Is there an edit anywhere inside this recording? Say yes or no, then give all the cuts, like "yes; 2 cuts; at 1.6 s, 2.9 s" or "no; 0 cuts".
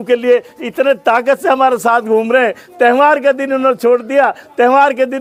no; 0 cuts